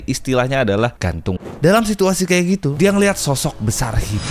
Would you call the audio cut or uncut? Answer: cut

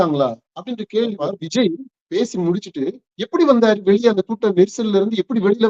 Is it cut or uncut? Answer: cut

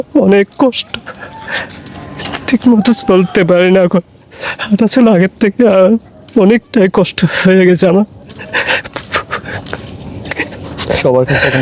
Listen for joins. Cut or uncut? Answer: uncut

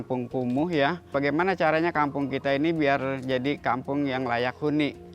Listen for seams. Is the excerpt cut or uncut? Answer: cut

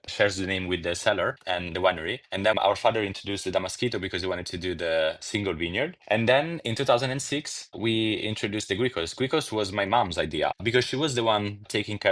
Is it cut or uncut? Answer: cut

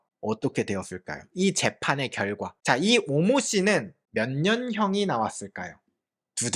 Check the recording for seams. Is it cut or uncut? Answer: uncut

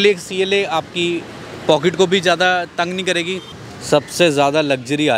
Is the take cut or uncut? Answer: cut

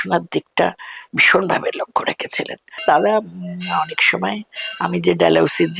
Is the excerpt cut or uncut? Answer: cut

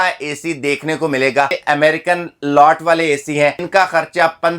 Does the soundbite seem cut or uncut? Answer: cut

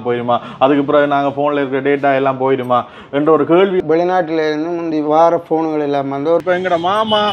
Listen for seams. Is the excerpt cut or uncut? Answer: cut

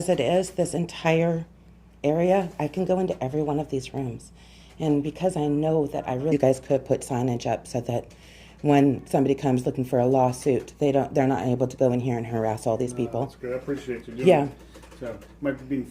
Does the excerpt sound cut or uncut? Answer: cut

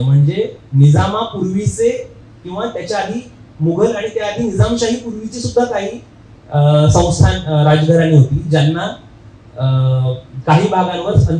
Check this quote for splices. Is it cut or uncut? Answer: uncut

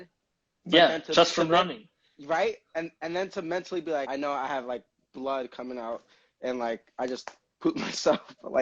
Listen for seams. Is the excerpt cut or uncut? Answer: cut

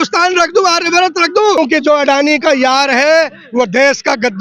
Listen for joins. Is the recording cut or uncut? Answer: cut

